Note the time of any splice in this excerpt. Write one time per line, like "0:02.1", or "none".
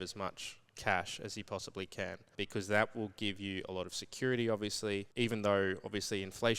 0:02.2
0:05.1